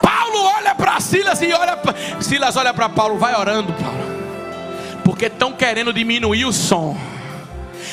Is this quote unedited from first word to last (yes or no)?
yes